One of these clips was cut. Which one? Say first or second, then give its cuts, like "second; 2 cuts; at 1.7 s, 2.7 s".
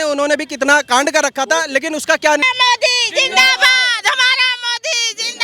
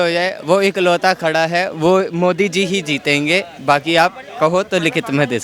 first; 1 cut; at 2.4 s